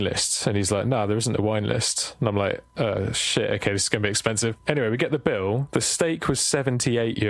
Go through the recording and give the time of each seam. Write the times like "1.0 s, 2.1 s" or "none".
4.6 s